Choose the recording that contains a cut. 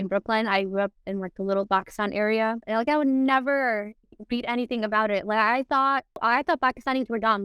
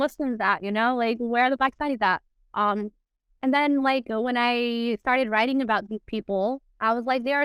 first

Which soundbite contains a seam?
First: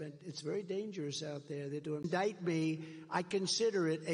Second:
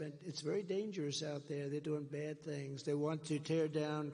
second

